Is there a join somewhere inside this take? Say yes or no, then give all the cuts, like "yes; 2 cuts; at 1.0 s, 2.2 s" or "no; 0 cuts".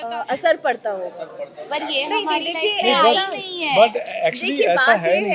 no; 0 cuts